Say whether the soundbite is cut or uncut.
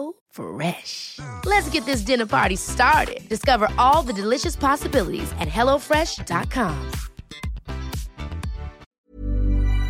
cut